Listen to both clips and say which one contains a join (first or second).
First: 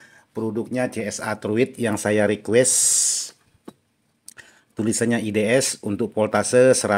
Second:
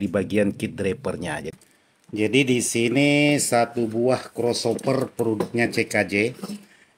second